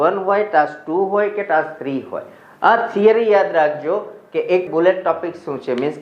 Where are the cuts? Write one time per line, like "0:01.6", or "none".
0:04.7

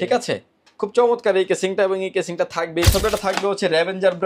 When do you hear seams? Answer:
0:02.9

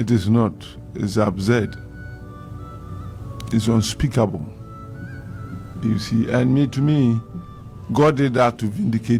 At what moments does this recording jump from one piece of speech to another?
none

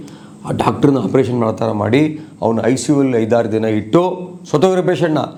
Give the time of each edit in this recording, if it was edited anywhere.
none

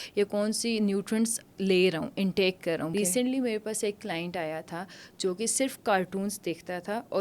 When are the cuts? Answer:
0:02.9

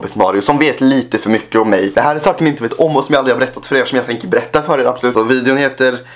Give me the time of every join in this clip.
0:01.9
0:05.1

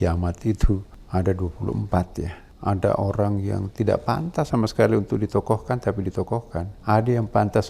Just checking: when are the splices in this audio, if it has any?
0:00.9
0:02.4
0:06.7

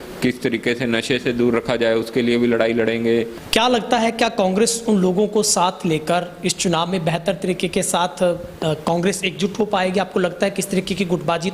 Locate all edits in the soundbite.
0:03.4

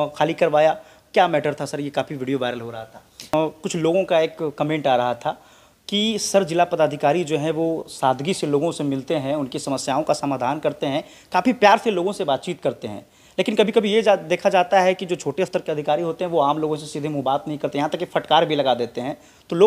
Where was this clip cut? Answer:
0:03.3

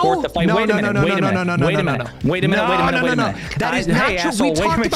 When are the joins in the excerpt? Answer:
0:03.5

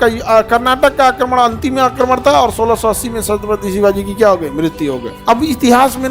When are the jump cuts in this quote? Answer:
0:05.1

